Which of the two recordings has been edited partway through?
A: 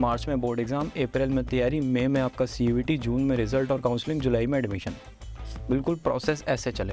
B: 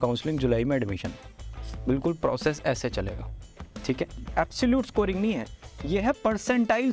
B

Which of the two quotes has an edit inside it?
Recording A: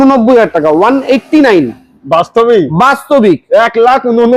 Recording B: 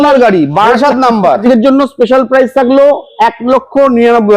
B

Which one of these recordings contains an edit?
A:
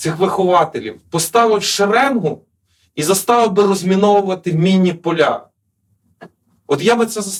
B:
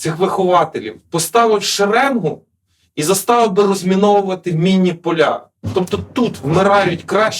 B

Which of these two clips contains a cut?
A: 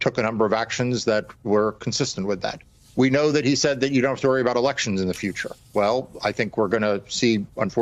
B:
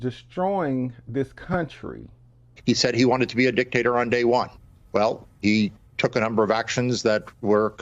B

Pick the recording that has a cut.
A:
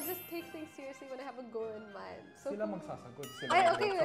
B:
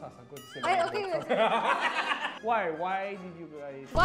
B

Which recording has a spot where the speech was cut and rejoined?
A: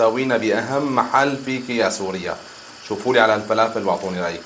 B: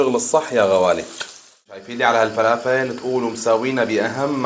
B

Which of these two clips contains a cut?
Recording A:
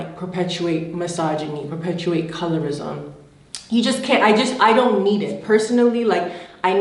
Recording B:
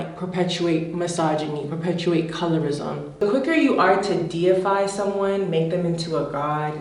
B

